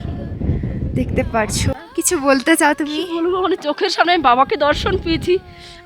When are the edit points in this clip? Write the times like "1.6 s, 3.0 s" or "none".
1.7 s